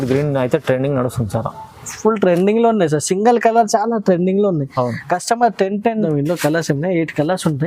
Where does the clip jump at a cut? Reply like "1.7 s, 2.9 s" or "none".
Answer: 5.9 s